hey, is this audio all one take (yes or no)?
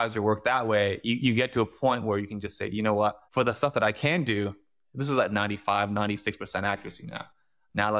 no